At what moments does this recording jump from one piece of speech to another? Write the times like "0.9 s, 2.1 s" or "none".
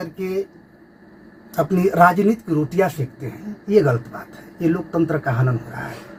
none